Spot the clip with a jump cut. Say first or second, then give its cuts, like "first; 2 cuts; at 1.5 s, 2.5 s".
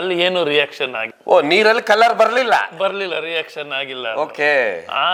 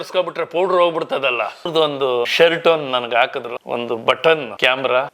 second; 1 cut; at 1.7 s